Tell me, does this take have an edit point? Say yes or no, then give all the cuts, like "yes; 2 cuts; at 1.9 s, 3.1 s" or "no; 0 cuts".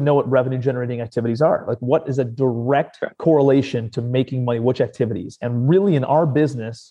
yes; 1 cut; at 3.1 s